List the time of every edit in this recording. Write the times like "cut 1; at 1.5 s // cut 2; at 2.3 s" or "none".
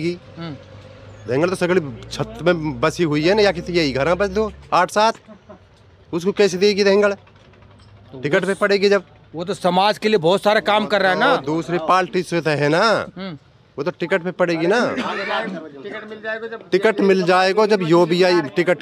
none